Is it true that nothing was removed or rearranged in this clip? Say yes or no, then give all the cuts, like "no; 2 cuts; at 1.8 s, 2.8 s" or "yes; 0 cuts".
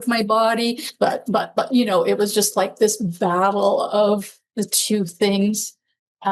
yes; 0 cuts